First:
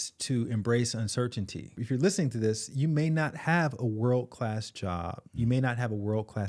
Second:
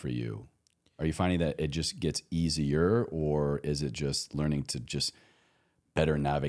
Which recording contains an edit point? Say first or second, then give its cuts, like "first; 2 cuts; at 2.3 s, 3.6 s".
first; 1 cut; at 1.8 s